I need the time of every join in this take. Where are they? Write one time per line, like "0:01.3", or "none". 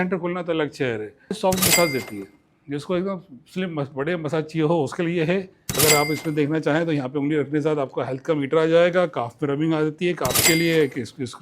0:01.4
0:05.6
0:10.4